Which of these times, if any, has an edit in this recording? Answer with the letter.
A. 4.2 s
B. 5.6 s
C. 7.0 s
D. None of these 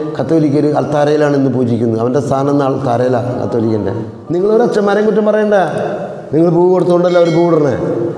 A